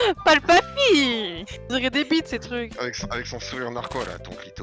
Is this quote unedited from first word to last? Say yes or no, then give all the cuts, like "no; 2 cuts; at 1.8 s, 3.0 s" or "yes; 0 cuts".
no; 1 cut; at 1.7 s